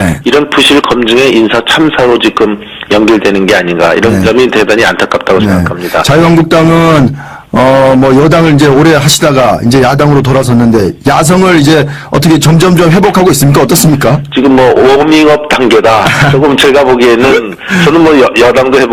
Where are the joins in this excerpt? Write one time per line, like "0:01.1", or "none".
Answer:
0:16.6